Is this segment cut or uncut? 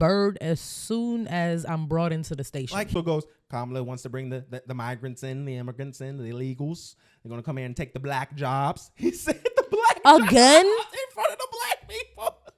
cut